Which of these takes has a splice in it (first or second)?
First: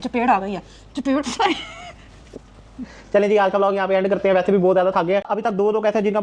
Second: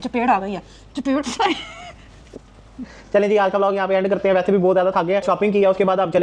first